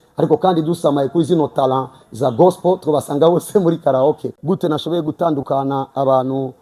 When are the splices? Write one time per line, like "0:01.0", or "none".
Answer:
0:04.3